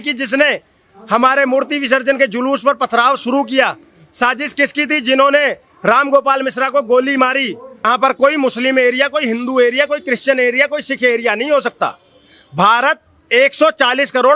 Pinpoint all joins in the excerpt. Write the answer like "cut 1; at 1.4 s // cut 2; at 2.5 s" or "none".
cut 1; at 7.9 s